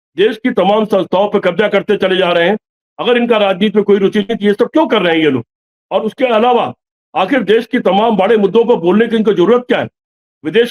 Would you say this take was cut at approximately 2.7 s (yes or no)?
no